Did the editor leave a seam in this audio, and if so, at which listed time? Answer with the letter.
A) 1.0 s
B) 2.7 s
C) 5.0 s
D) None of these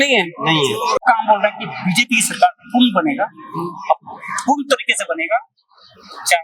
A